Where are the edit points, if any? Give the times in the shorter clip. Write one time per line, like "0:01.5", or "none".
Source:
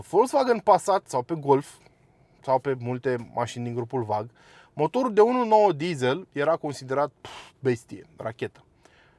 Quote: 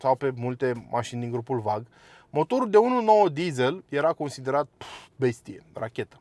none